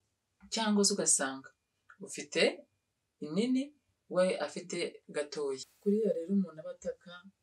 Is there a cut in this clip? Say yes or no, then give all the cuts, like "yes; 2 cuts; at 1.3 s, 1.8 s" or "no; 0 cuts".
yes; 1 cut; at 5.7 s